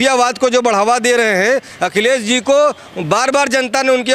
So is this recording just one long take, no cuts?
yes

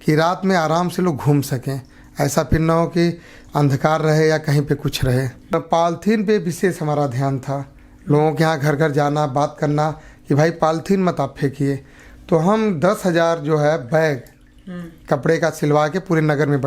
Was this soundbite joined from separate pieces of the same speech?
yes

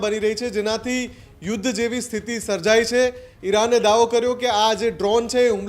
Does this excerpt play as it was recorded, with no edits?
no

